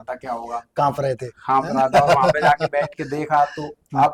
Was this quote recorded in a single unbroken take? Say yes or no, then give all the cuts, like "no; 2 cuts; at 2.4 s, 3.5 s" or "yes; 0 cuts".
yes; 0 cuts